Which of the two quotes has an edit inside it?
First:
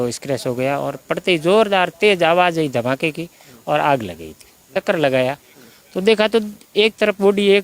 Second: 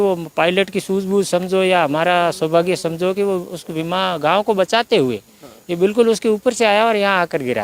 first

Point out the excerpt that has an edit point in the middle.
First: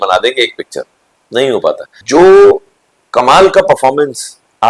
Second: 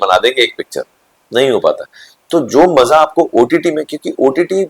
first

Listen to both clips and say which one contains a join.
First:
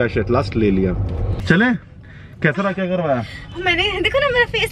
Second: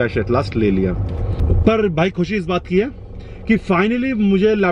first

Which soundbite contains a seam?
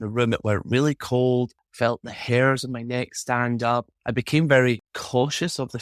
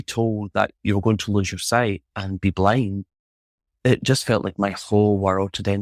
first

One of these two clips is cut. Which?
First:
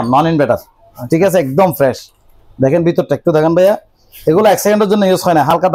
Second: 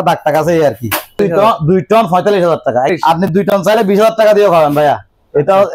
second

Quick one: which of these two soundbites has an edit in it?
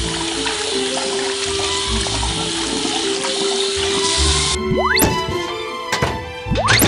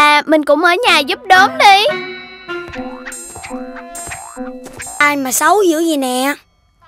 second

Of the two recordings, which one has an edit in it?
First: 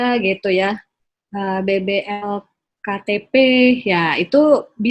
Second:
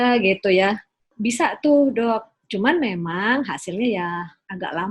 second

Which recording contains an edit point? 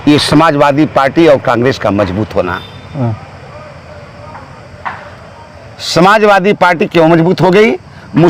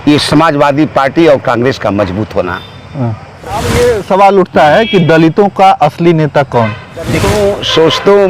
second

